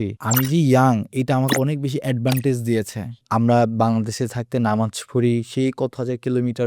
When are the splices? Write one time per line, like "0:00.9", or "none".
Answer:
0:03.1